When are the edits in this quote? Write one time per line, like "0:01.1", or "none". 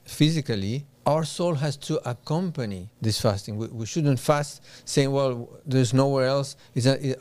0:00.9
0:02.9